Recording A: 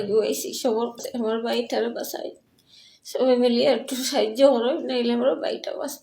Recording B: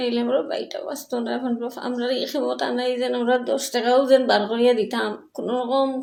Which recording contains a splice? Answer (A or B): A